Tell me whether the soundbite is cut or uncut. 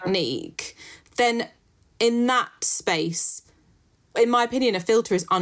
cut